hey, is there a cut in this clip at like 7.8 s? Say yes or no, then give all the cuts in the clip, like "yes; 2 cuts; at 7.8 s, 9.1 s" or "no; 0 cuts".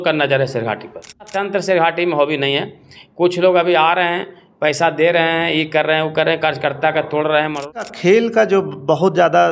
yes; 2 cuts; at 1.3 s, 7.8 s